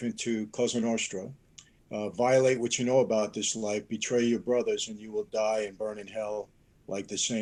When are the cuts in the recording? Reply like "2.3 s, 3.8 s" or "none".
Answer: none